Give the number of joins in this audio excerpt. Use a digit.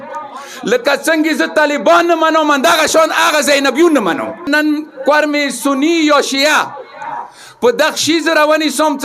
1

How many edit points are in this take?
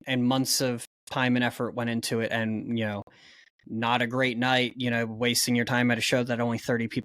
0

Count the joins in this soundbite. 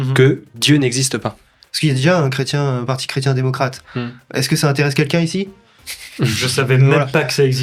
1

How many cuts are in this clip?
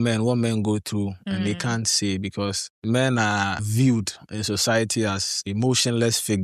3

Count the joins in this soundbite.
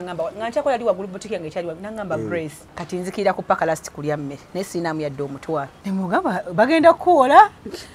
2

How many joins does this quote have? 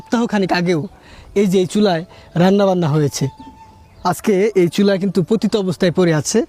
0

